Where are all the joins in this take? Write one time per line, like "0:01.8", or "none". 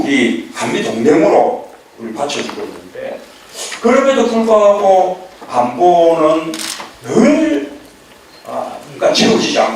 0:01.0